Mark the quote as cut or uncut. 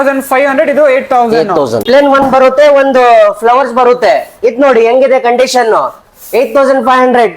cut